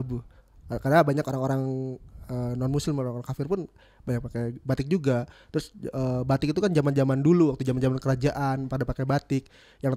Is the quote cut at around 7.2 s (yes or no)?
no